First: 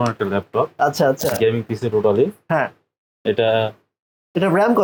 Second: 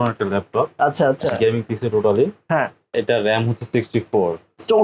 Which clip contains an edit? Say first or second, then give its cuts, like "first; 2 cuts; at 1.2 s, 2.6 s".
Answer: second; 1 cut; at 2.8 s